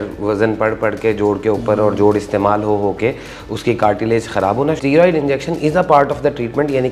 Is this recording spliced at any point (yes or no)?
yes